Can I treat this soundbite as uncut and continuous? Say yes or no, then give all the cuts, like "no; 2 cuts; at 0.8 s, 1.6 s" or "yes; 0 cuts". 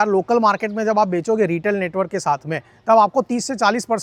yes; 0 cuts